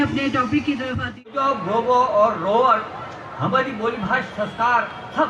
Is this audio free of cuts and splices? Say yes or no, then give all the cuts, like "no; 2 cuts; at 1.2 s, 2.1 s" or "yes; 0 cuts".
no; 1 cut; at 1.3 s